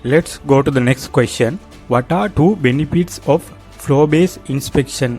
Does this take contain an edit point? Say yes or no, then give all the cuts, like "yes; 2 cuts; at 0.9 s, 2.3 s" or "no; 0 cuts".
yes; 1 cut; at 1.7 s